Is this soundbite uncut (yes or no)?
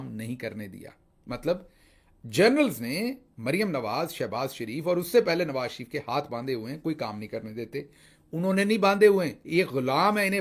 yes